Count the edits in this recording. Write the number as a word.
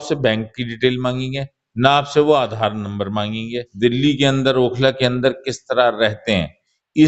one